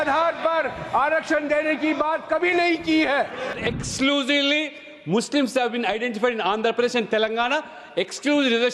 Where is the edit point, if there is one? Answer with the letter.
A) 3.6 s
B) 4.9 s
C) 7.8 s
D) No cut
A